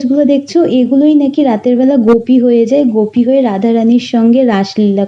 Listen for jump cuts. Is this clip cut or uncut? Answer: uncut